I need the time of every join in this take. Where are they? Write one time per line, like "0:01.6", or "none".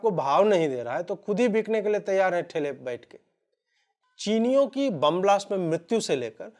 none